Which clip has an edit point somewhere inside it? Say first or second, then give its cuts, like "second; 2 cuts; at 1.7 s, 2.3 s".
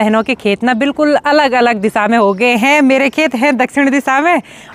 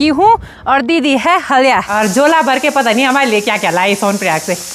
second; 1 cut; at 1.9 s